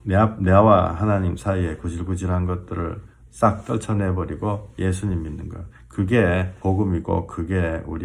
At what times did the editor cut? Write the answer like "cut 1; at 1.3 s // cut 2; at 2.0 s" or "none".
cut 1; at 6.5 s